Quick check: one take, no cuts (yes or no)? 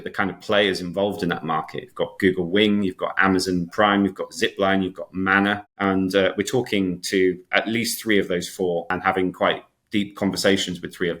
no